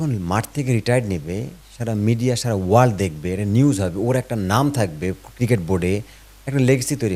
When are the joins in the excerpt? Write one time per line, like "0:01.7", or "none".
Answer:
none